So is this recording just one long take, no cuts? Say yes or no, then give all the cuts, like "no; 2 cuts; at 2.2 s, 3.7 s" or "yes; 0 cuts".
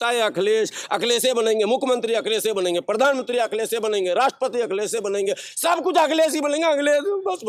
yes; 0 cuts